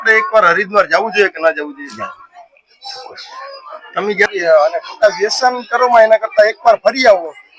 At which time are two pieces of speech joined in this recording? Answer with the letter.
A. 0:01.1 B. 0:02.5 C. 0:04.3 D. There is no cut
C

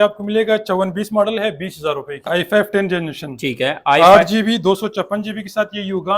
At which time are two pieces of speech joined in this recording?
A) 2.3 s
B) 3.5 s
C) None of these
A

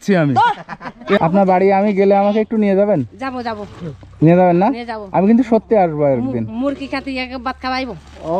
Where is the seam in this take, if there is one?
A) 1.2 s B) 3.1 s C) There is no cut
A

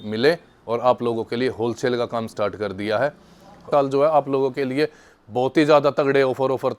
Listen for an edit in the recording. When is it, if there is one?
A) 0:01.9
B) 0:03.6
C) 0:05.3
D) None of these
B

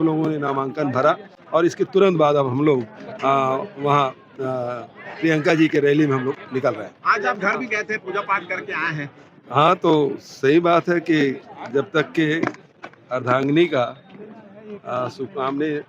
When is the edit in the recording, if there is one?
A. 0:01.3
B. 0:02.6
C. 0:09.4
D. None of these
D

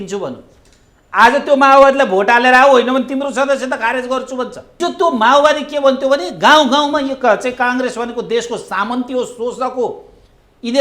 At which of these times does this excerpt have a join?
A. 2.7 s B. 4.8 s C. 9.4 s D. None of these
B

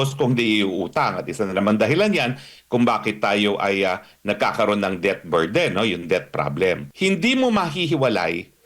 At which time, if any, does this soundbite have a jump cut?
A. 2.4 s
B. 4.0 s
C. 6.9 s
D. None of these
C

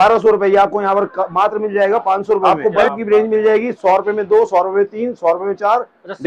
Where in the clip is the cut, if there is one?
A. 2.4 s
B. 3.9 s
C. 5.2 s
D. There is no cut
A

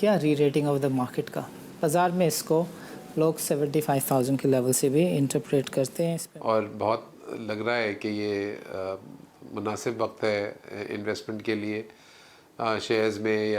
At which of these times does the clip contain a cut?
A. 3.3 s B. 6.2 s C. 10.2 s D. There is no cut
B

